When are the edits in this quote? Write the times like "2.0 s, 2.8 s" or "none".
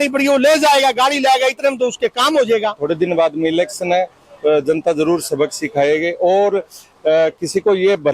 2.8 s